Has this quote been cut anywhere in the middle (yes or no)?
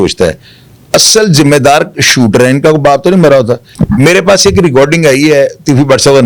yes